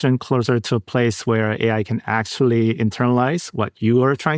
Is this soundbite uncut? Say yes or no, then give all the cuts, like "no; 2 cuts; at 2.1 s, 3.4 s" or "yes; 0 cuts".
yes; 0 cuts